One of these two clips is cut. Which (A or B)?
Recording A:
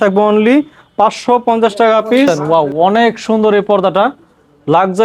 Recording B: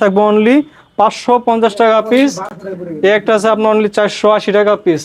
A